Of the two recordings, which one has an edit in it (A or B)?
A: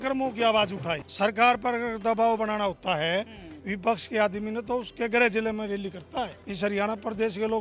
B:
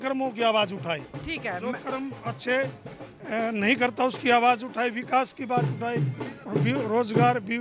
A